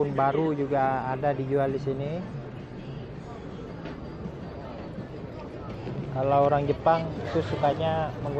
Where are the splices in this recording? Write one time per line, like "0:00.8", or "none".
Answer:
none